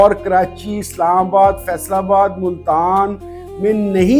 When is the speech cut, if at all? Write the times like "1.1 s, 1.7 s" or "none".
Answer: none